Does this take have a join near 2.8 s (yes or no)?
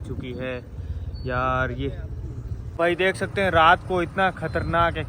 yes